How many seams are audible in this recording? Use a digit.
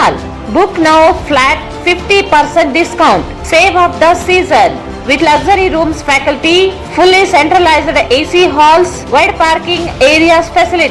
0